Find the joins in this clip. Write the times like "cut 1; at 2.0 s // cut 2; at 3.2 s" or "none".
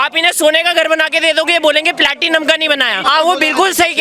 cut 1; at 3.1 s